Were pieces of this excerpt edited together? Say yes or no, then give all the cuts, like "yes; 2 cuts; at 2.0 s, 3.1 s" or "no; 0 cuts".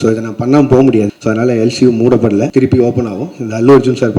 yes; 2 cuts; at 1.1 s, 2.5 s